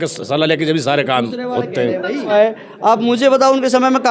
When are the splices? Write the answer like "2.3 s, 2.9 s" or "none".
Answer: 2.3 s